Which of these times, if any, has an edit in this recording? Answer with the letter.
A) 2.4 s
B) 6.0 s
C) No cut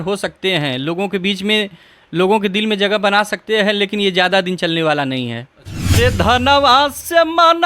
B